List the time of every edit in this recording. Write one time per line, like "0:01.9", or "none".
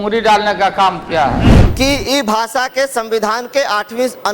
0:01.6